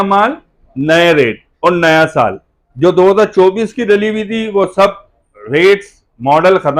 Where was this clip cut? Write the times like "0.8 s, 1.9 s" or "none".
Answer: none